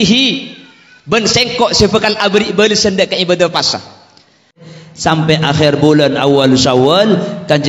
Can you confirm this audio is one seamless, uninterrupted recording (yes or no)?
no